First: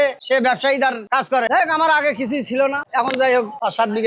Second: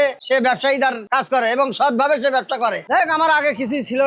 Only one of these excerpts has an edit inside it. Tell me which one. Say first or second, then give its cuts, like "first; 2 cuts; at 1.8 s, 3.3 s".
first; 1 cut; at 1.5 s